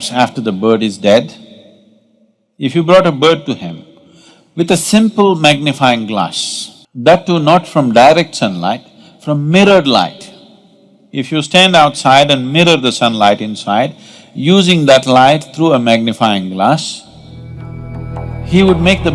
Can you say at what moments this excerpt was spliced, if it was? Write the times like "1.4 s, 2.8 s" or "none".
none